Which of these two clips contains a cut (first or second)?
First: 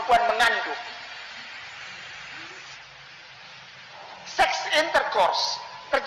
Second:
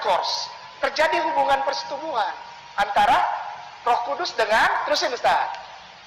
first